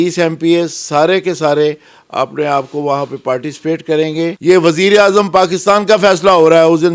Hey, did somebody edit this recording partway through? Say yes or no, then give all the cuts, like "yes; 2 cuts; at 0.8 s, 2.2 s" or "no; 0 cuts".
yes; 1 cut; at 4.4 s